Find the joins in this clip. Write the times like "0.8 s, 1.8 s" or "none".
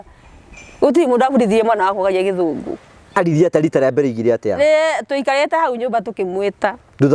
3.0 s